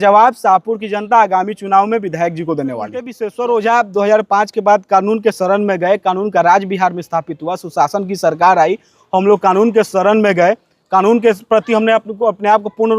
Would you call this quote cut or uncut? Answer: cut